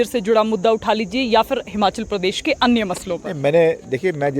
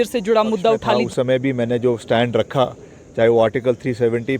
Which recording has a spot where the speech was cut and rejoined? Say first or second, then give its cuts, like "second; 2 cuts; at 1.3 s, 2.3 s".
second; 1 cut; at 1.0 s